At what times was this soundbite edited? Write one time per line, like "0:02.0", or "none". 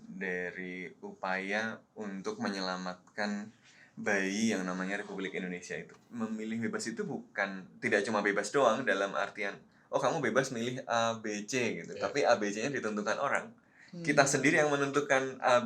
0:06.0